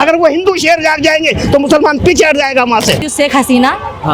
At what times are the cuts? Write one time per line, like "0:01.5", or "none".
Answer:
0:03.1